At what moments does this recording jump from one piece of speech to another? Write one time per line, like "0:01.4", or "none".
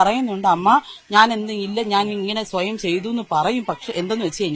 none